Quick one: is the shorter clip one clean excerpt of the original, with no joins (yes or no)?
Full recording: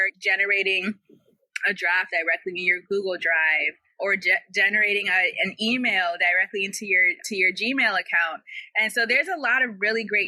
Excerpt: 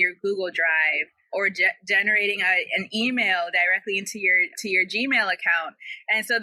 yes